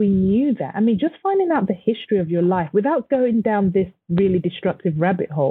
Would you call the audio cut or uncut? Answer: uncut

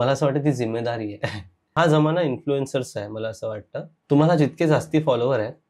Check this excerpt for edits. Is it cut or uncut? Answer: cut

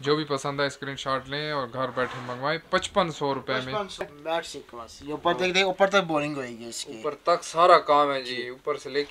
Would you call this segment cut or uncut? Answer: cut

